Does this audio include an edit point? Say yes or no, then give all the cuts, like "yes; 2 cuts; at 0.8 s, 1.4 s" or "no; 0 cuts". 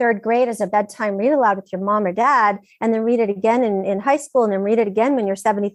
no; 0 cuts